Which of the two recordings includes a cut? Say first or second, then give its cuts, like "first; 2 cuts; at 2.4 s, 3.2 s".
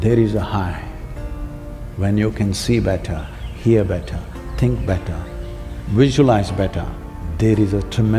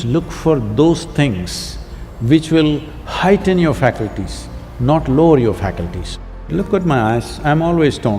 second; 1 cut; at 6.5 s